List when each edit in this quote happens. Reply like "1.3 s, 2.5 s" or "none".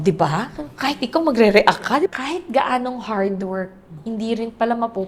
2.0 s, 3.9 s